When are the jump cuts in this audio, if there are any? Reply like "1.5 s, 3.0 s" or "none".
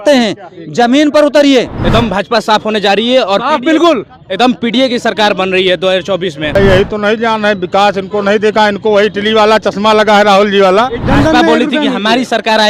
1.7 s, 6.5 s, 11.0 s